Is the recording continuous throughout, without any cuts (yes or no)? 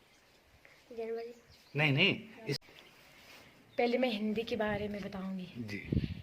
no